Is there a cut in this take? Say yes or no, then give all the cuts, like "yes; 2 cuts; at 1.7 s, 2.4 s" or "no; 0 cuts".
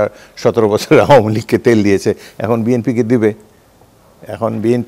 no; 0 cuts